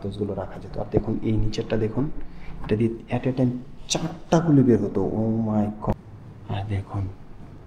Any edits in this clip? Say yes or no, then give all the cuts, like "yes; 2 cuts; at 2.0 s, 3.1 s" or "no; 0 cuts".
yes; 1 cut; at 5.9 s